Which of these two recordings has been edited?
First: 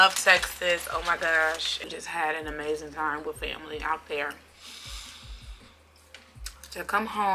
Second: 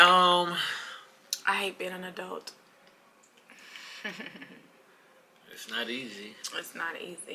first; 1 cut; at 1.8 s

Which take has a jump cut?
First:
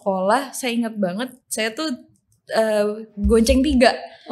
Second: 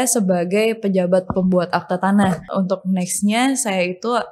second; 1 cut; at 2.5 s

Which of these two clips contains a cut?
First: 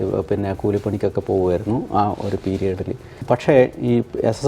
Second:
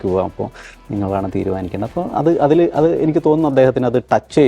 first; 1 cut; at 3.1 s

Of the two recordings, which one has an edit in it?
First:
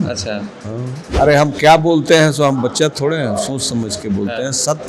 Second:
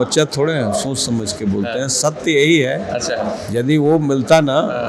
first; 1 cut; at 1.1 s

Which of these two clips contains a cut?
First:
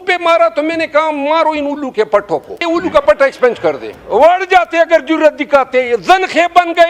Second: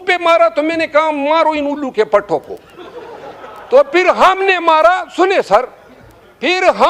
first; 2 cuts; at 2.6 s, 3.9 s

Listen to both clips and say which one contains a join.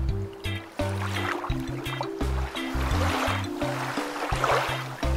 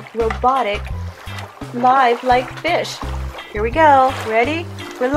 first; 1 cut; at 3.2 s

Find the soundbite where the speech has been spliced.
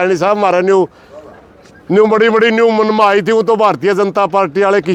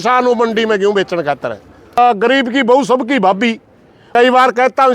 second; 2 cuts; at 2.0 s, 4.1 s

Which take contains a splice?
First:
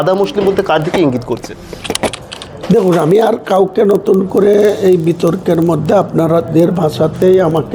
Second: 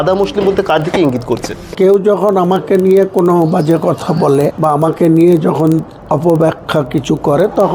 second; 2 cuts; at 1.7 s, 4.6 s

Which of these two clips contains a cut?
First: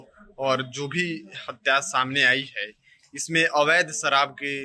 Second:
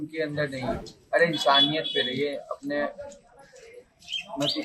second; 1 cut; at 0.9 s

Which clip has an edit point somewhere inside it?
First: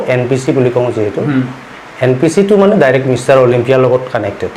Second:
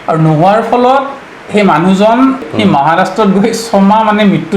second; 1 cut; at 2.5 s

